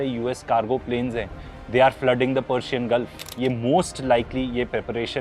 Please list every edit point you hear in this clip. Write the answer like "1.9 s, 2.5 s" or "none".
3.3 s